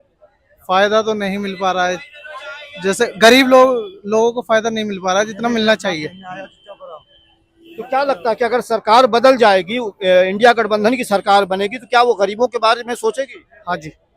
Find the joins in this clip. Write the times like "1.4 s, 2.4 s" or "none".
none